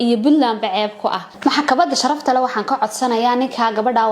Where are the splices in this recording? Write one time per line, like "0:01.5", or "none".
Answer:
0:01.3